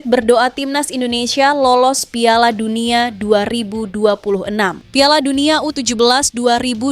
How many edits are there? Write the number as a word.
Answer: one